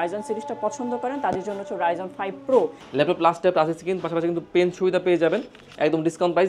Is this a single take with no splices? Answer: no; 1 cut; at 2.8 s

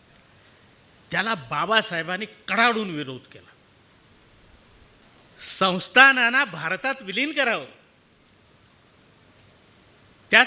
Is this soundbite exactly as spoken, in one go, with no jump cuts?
no; 1 cut; at 5.0 s

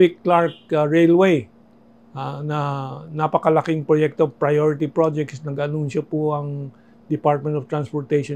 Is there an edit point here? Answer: no; 0 cuts

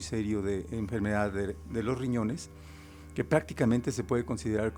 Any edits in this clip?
no; 0 cuts

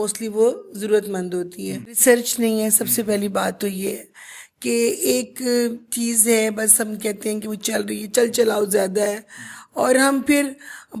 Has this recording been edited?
yes; 1 cut; at 2.0 s

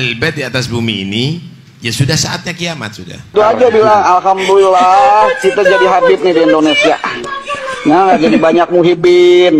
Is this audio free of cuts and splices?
no; 1 cut; at 3.3 s

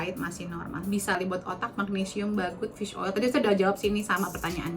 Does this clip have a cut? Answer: yes; 1 cut; at 1.2 s

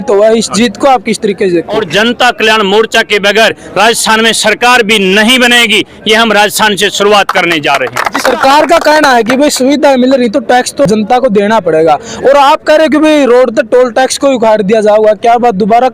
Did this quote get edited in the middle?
yes; 2 cuts; at 1.9 s, 8.1 s

